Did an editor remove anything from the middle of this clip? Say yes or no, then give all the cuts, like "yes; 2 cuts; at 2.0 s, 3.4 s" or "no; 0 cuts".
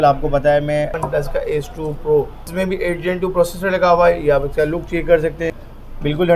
yes; 3 cuts; at 1.0 s, 2.4 s, 5.6 s